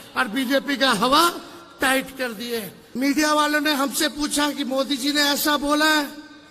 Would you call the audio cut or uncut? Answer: cut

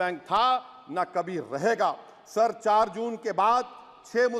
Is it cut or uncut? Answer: uncut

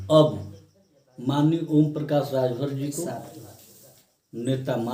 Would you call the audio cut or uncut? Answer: uncut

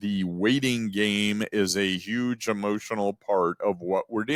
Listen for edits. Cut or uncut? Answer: uncut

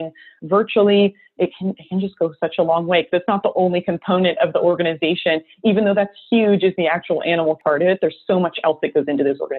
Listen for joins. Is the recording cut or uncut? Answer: cut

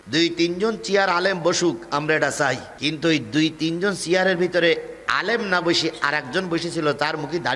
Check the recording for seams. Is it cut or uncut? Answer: cut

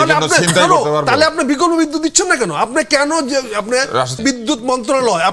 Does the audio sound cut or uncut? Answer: cut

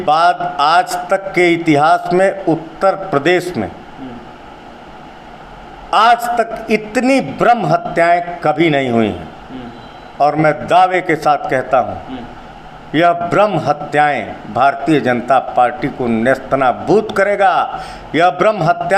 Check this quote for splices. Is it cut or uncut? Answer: uncut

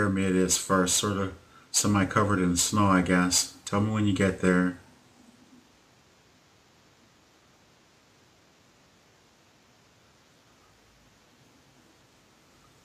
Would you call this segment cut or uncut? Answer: cut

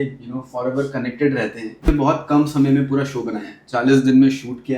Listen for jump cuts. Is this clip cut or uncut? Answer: cut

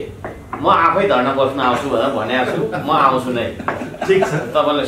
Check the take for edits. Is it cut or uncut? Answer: uncut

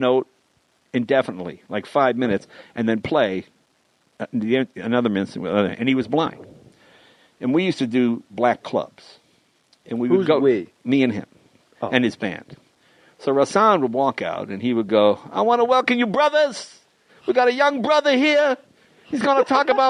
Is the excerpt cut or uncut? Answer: uncut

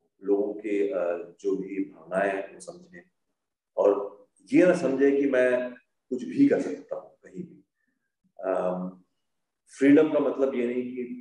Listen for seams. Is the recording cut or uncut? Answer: uncut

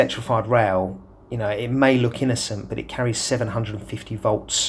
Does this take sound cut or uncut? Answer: uncut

